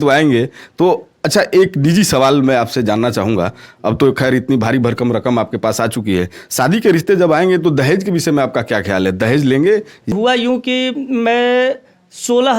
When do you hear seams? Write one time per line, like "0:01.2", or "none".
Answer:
0:10.1